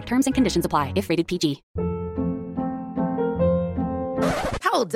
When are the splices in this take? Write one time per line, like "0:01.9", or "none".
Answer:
0:01.7